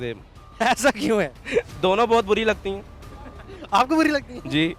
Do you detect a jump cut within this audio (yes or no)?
no